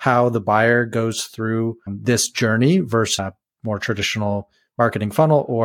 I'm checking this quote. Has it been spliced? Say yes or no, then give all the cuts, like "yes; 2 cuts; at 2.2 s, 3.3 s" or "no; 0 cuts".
yes; 2 cuts; at 1.9 s, 3.1 s